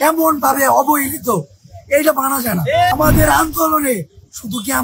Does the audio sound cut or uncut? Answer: cut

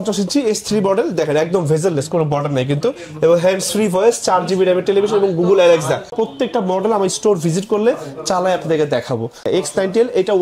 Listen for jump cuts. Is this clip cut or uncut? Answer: cut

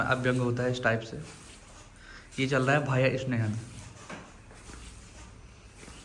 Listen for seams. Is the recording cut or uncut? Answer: uncut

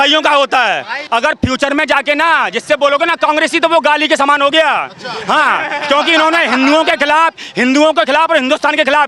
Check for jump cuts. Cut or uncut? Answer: cut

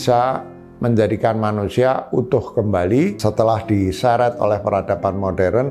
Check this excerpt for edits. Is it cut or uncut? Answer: cut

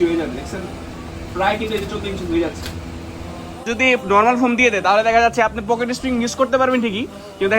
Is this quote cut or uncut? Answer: cut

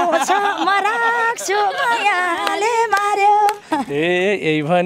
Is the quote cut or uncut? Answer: cut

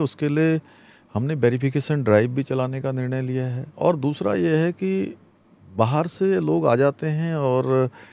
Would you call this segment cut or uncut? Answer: cut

